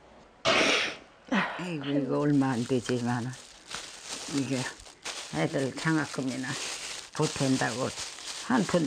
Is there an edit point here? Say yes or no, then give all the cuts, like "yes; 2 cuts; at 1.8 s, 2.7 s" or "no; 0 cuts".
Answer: yes; 1 cut; at 1.6 s